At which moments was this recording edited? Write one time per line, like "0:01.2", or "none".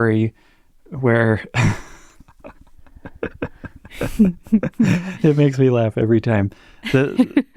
none